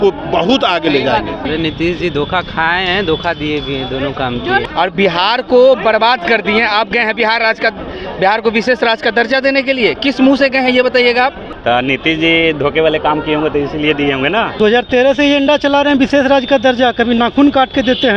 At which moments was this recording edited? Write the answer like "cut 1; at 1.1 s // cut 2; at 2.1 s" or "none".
cut 1; at 1.4 s // cut 2; at 4.6 s // cut 3; at 11.5 s // cut 4; at 14.5 s